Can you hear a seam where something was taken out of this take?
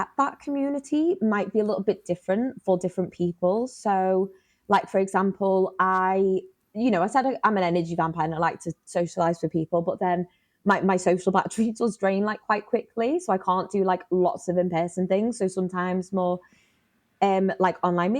no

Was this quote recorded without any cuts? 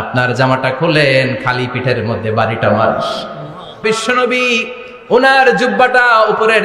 no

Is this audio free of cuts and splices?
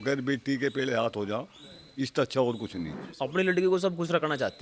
no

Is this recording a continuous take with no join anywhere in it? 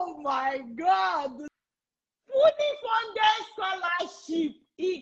no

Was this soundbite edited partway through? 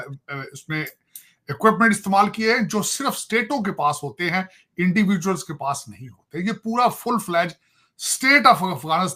no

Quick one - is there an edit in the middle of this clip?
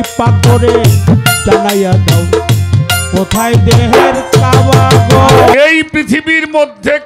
yes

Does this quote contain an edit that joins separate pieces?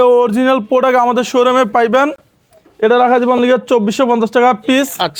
no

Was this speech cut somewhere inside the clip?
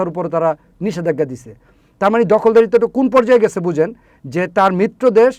no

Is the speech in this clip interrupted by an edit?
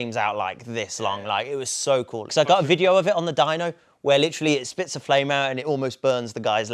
yes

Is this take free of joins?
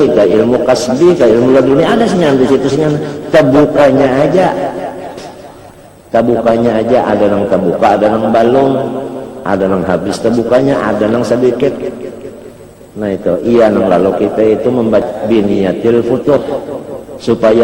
no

